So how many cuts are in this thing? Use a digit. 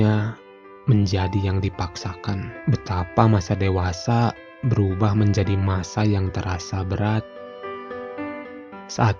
1